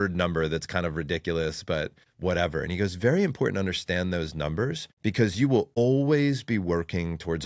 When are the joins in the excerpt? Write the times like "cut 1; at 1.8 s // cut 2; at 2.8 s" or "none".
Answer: cut 1; at 2.0 s // cut 2; at 4.9 s // cut 3; at 5.8 s